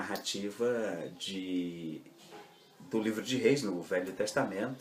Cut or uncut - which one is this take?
cut